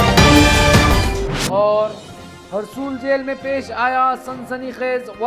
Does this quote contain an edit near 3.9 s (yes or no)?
no